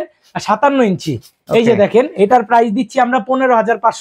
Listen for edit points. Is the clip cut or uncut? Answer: uncut